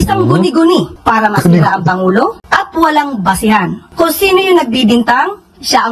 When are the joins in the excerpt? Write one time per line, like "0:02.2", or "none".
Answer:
0:03.9